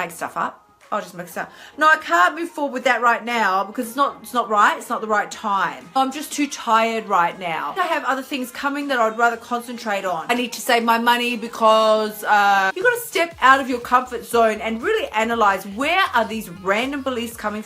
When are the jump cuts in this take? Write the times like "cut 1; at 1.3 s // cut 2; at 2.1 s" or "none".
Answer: cut 1; at 5.9 s // cut 2; at 7.7 s // cut 3; at 10.3 s // cut 4; at 12.7 s